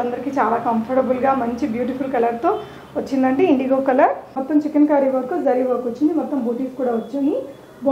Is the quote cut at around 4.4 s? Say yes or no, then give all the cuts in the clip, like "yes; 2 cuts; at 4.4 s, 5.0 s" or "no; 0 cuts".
yes; 1 cut; at 4.4 s